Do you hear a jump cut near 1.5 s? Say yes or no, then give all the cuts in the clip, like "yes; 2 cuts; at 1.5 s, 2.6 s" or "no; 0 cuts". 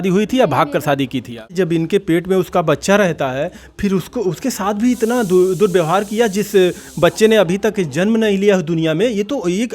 yes; 1 cut; at 1.5 s